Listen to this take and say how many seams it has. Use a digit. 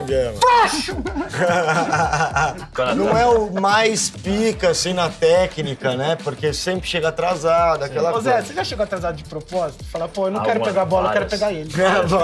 1